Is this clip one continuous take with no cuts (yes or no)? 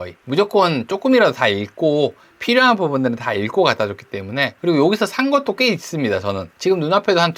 no